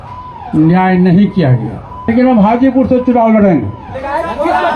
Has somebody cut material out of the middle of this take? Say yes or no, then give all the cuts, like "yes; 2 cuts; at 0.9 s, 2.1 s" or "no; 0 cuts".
yes; 1 cut; at 1.9 s